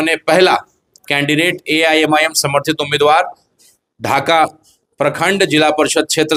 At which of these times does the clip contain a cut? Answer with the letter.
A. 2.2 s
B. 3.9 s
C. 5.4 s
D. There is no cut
D